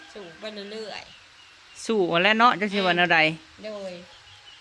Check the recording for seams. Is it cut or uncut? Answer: uncut